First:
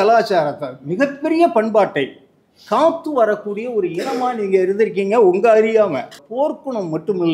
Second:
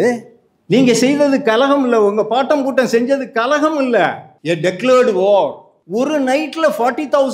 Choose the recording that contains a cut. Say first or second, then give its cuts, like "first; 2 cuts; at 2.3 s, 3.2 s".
first; 1 cut; at 6.2 s